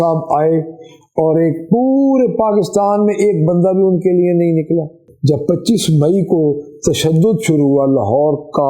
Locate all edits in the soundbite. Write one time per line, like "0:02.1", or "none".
0:05.0